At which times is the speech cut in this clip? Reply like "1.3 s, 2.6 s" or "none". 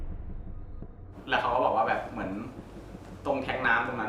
1.1 s